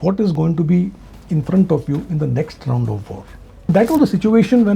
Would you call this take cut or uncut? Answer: cut